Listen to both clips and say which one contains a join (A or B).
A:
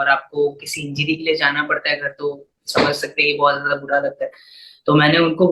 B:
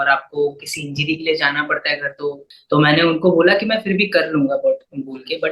B